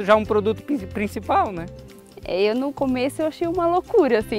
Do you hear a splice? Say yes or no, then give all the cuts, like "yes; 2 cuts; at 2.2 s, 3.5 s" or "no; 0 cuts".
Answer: no; 0 cuts